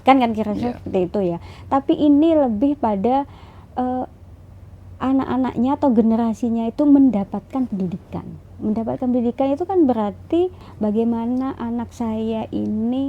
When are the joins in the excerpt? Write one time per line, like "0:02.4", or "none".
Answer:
0:10.6